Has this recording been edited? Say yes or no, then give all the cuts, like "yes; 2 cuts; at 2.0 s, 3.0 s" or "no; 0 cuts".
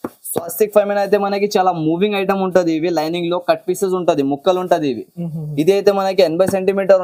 no; 0 cuts